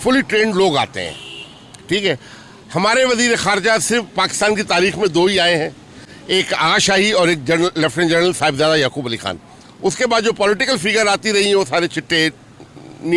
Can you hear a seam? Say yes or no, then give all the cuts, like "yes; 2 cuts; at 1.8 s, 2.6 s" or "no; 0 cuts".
no; 0 cuts